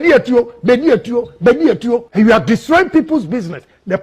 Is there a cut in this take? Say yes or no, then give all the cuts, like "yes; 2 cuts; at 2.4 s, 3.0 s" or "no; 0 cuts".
yes; 1 cut; at 2.1 s